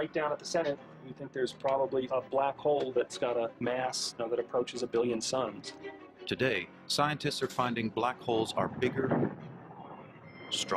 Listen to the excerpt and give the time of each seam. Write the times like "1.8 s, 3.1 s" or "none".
2.5 s

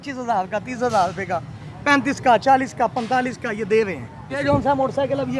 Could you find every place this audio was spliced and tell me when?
4.4 s

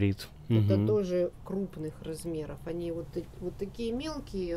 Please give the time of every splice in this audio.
1.3 s

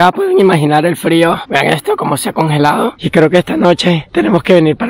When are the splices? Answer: 1.4 s, 3.0 s

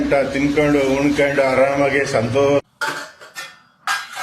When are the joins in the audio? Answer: 2.6 s

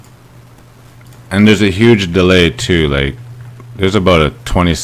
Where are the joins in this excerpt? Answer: none

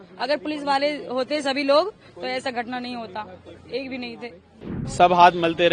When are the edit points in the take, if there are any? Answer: 4.8 s

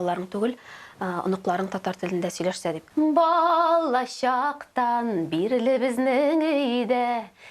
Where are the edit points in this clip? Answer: 2.8 s

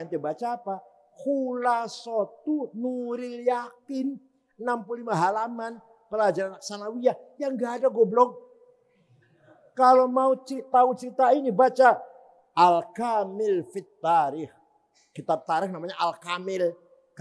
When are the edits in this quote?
none

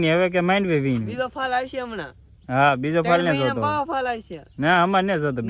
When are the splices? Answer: none

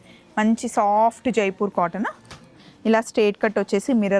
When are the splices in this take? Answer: none

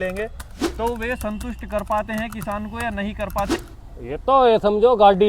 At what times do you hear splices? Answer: 3.5 s

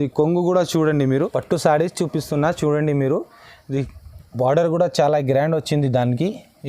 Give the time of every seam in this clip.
1.1 s

